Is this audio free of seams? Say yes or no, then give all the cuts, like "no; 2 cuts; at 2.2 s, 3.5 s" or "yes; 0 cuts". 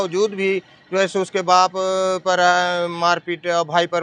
yes; 0 cuts